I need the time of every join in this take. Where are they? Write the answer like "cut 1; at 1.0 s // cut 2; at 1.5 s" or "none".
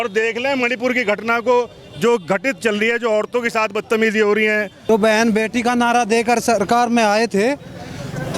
cut 1; at 4.9 s

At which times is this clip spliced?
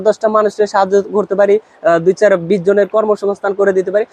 none

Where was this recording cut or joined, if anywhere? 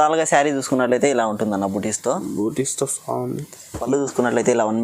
cut 1; at 3.9 s

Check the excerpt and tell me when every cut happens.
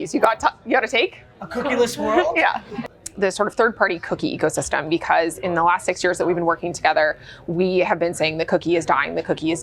cut 1; at 2.7 s

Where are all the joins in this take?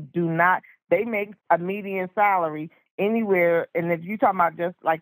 cut 1; at 1.3 s

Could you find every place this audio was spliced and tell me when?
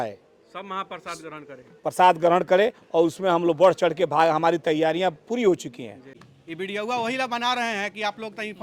cut 1; at 6.2 s

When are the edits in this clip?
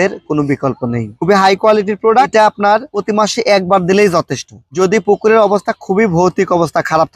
cut 1; at 2.3 s

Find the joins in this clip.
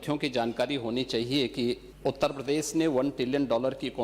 cut 1; at 1.9 s

